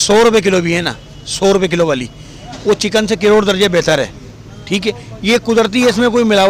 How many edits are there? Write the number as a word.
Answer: zero